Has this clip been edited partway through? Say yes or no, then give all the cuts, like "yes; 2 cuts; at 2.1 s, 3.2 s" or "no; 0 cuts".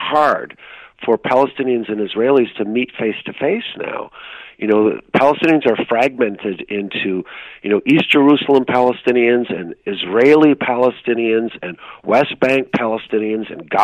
no; 0 cuts